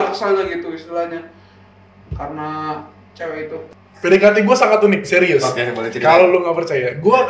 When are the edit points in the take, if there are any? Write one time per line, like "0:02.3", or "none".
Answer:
0:03.6

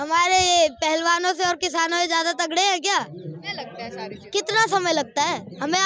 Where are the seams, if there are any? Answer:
0:03.4

